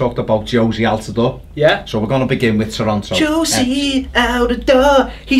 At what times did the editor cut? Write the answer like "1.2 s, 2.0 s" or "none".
3.7 s